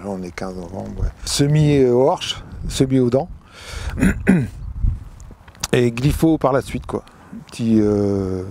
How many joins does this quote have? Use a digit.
1